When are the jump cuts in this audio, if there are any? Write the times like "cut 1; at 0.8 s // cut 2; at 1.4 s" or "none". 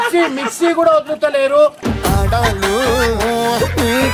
none